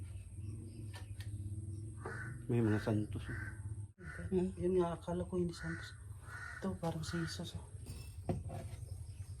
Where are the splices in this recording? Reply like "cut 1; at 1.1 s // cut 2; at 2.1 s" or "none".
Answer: cut 1; at 4.1 s